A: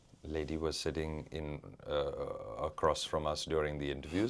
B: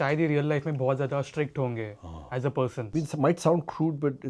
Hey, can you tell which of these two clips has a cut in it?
B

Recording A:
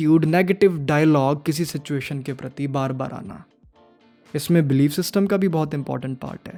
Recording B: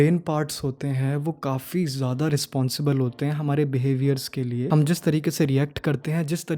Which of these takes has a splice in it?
B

